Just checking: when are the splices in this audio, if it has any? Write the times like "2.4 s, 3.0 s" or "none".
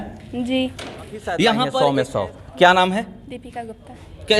1.7 s